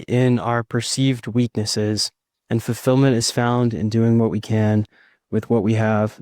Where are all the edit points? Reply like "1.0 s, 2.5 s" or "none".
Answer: none